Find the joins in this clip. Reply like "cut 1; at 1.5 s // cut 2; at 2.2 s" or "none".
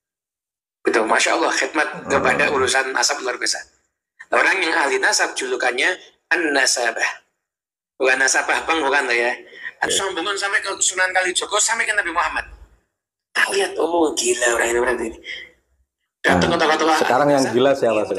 cut 1; at 9.9 s